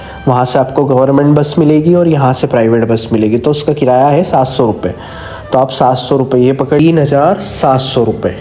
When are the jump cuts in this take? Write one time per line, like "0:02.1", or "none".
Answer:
0:06.8